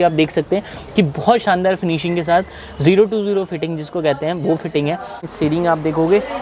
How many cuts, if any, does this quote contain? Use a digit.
1